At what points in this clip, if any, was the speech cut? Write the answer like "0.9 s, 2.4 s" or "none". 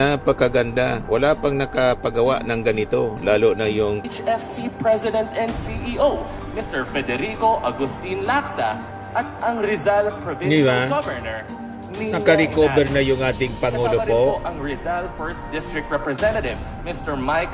4.0 s